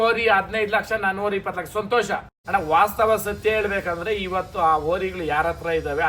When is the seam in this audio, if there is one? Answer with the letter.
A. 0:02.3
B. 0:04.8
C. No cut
A